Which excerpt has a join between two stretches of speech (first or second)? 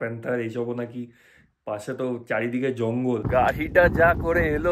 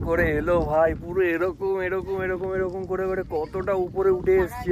first